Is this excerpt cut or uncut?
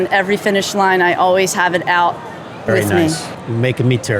cut